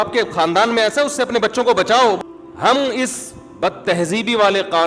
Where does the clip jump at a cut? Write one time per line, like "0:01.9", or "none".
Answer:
0:02.2